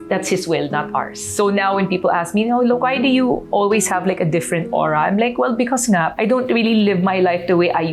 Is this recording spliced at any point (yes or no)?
no